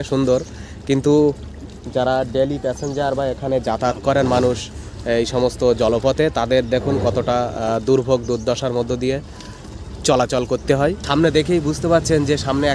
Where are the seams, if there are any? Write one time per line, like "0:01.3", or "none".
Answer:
0:11.0